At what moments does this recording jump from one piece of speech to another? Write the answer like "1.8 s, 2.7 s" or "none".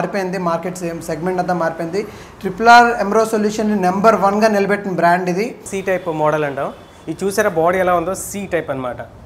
5.7 s